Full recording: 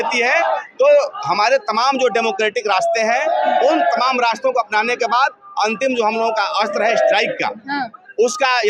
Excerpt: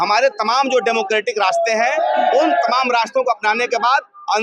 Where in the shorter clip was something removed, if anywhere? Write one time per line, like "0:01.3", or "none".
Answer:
none